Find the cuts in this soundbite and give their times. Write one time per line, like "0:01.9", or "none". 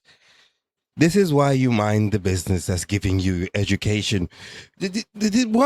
none